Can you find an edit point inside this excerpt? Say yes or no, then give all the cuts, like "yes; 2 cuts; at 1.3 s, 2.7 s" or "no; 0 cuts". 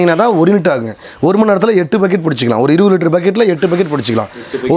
no; 0 cuts